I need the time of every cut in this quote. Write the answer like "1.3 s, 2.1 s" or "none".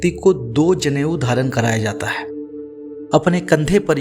2.6 s